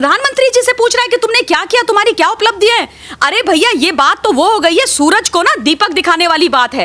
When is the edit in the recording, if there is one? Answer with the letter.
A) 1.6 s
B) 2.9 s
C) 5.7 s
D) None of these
D